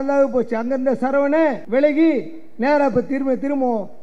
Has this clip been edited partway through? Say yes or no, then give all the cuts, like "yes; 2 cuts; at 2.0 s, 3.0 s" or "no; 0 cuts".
yes; 1 cut; at 1.6 s